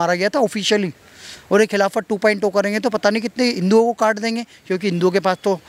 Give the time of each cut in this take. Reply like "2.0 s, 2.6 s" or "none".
none